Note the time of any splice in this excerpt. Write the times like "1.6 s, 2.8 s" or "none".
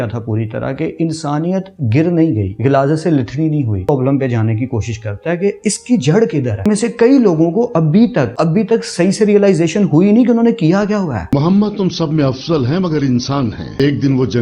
2.5 s, 3.9 s, 6.7 s, 8.3 s, 11.3 s